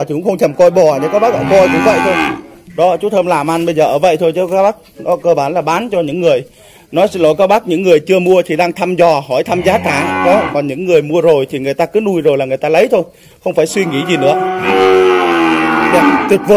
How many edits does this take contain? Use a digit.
1